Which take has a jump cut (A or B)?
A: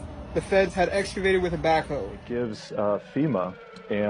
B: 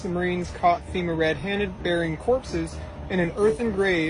A